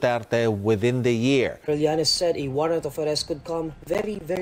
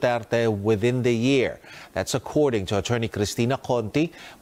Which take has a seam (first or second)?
first